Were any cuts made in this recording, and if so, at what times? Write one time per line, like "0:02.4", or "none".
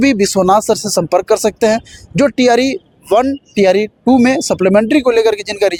none